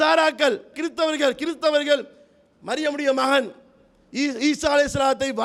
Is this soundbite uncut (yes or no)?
yes